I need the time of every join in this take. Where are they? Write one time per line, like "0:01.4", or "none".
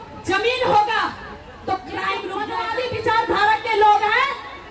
0:02.4